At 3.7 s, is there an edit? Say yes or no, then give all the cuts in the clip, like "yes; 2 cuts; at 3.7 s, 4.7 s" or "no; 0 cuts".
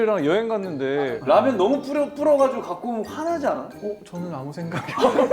yes; 2 cuts; at 1.2 s, 3.7 s